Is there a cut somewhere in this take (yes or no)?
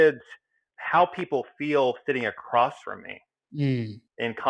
no